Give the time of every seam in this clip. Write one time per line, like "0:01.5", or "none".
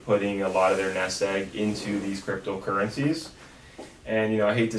none